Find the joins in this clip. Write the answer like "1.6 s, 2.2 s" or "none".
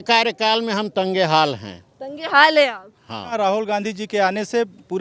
3.3 s